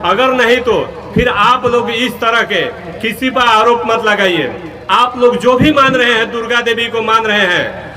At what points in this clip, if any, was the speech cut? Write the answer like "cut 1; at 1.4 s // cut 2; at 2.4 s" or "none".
none